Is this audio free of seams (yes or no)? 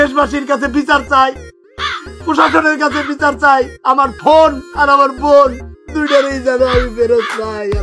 yes